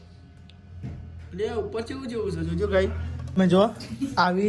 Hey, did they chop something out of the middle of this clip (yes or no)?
yes